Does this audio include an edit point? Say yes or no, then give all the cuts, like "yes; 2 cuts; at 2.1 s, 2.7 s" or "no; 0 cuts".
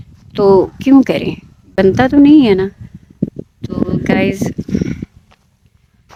no; 0 cuts